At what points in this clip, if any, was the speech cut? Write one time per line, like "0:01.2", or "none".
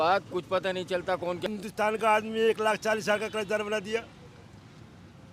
0:01.5